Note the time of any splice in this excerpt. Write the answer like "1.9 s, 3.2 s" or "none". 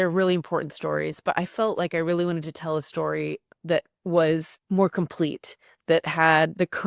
4.5 s